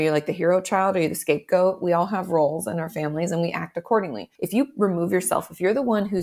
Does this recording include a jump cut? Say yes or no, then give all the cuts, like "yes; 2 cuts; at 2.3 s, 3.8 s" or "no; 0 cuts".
yes; 1 cut; at 4.3 s